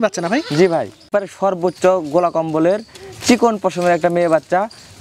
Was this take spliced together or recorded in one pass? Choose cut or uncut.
cut